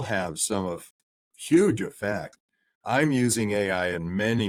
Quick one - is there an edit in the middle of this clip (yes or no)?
no